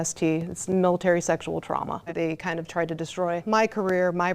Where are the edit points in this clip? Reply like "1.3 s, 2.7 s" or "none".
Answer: 2.1 s, 3.4 s